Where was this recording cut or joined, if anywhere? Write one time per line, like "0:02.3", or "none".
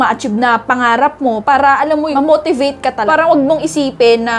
0:02.1
0:03.0